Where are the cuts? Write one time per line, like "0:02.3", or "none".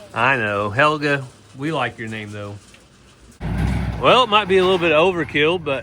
0:03.5